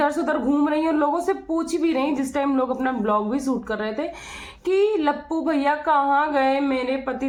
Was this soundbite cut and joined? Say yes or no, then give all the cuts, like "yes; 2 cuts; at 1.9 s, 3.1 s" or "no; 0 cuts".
no; 0 cuts